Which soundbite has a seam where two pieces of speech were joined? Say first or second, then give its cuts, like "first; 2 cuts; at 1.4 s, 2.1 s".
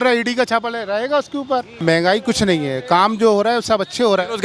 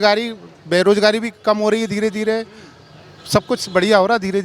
first; 1 cut; at 1.7 s